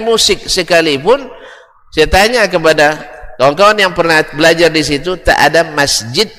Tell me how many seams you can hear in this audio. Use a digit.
0